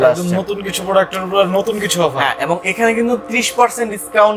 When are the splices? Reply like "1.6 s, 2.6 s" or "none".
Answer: none